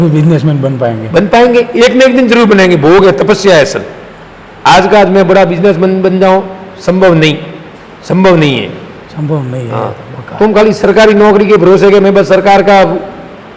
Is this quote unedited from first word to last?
yes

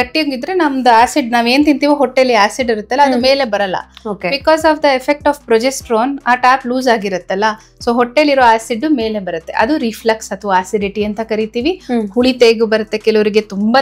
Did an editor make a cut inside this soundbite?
no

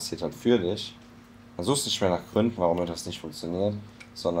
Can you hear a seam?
no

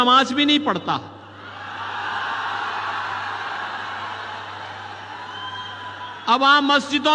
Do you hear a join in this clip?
no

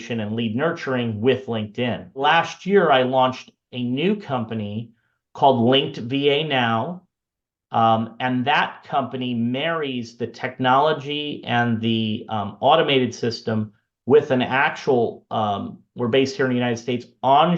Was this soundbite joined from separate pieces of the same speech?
yes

